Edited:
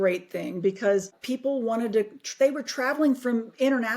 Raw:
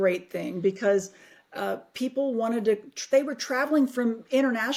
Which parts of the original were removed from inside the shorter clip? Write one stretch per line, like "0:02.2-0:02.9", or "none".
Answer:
0:01.2-0:01.9